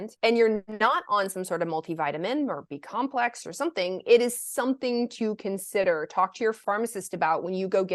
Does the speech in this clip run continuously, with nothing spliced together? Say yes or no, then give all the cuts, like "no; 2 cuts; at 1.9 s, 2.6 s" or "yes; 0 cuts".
yes; 0 cuts